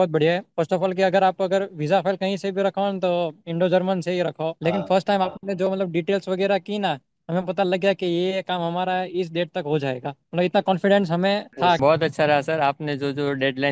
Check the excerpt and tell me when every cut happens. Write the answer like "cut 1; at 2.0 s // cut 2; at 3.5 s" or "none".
cut 1; at 4.5 s // cut 2; at 11.8 s